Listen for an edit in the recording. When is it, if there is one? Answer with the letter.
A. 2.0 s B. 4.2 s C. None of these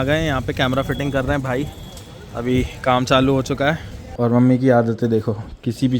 B